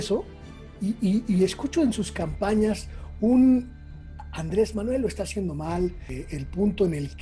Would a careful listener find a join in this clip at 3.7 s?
no; 1 cut; at 6.1 s

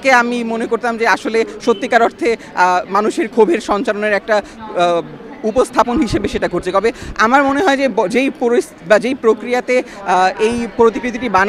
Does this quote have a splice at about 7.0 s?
no; 0 cuts

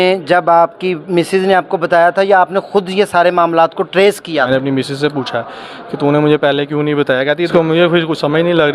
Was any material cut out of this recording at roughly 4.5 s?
yes; 2 cuts; at 4.5 s, 7.5 s

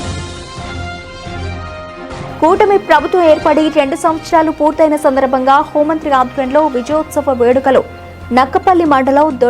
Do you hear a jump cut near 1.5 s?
yes; 1 cut; at 1.5 s

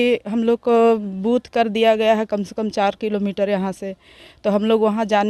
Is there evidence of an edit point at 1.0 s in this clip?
no; 0 cuts

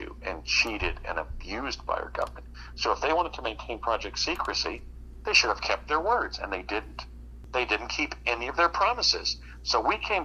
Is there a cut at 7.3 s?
yes; 1 cut; at 7.3 s

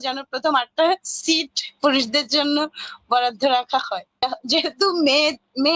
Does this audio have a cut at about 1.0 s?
no; 1 cut; at 4.2 s

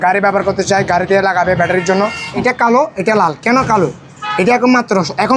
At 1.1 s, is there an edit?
no; 1 cut; at 2.3 s

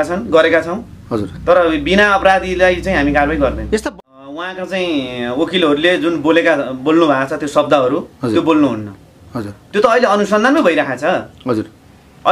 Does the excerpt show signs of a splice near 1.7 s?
no; 1 cut; at 3.8 s

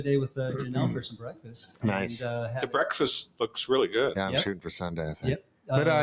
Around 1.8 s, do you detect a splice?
no; 0 cuts

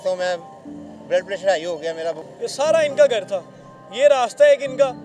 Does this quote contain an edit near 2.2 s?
yes; 1 cut; at 2.2 s

